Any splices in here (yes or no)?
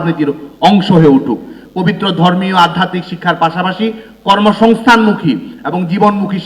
yes